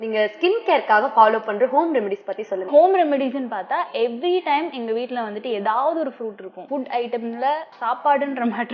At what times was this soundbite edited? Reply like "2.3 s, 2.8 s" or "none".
2.6 s, 6.6 s, 7.7 s